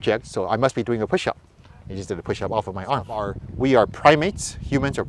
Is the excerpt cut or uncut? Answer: cut